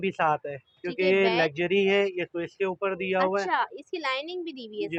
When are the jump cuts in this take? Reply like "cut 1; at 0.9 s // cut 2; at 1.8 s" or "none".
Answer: none